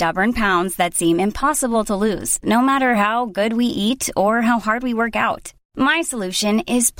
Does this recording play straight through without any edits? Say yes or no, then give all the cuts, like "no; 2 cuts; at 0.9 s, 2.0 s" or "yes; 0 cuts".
yes; 0 cuts